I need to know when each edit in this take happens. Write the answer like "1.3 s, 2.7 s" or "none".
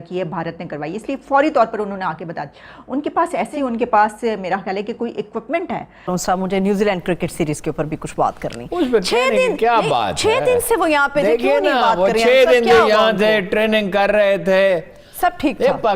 6.1 s